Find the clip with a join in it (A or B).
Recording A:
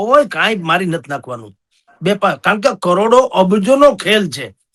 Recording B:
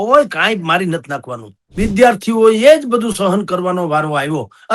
B